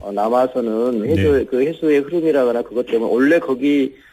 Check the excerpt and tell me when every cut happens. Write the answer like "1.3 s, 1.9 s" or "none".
2.6 s